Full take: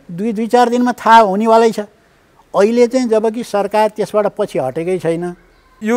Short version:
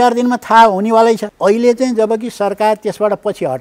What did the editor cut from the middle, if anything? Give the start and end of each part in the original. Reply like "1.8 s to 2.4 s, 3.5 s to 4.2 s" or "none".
1.8 s to 2.4 s